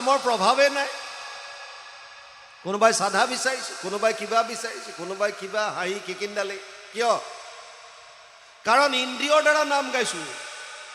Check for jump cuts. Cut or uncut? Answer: uncut